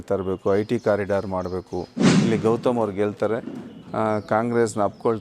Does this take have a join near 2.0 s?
yes; 1 cut; at 2.0 s

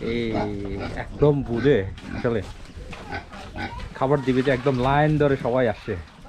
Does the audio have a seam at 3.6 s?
no; 0 cuts

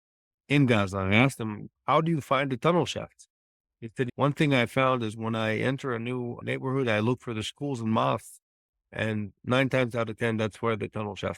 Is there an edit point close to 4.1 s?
yes; 1 cut; at 4.1 s

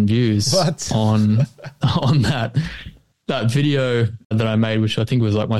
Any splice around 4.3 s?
yes; 1 cut; at 4.3 s

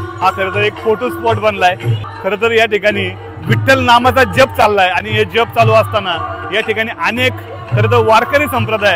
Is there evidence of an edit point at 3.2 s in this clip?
no; 1 cut; at 2.0 s

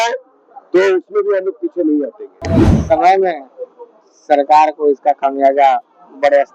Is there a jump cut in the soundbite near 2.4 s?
yes; 1 cut; at 2.4 s

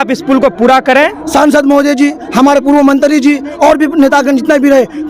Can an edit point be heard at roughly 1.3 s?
yes; 1 cut; at 1.3 s

